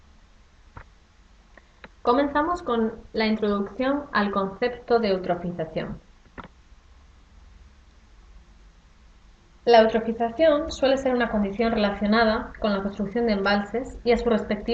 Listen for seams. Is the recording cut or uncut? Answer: cut